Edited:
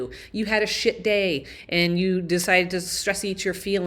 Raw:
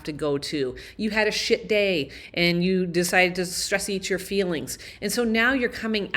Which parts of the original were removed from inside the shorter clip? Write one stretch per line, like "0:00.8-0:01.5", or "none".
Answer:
none